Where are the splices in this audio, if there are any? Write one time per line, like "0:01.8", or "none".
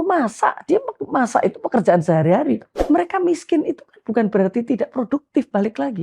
0:02.7